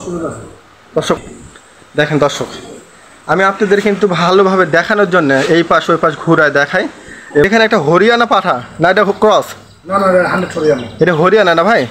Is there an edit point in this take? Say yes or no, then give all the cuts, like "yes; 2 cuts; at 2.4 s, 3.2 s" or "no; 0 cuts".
yes; 2 cuts; at 1.2 s, 7.4 s